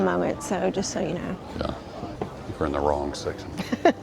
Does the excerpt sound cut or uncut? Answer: cut